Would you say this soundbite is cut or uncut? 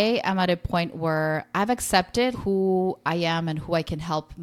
cut